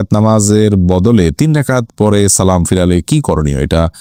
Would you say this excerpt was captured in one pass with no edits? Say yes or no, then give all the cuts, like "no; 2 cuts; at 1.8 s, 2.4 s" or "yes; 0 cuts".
yes; 0 cuts